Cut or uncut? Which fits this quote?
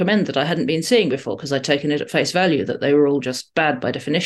uncut